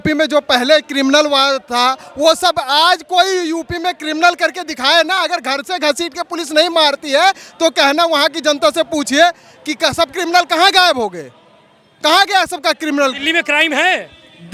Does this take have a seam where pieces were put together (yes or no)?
no